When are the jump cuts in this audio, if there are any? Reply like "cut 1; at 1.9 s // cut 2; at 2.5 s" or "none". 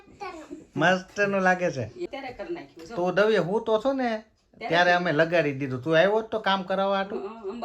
cut 1; at 2.0 s